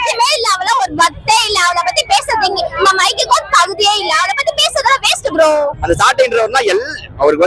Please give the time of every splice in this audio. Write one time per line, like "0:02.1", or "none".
0:05.7